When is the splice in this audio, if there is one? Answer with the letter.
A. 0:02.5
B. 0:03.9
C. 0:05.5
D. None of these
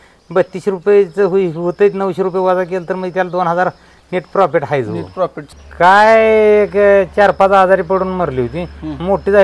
C